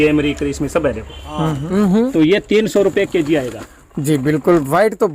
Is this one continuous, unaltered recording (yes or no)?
no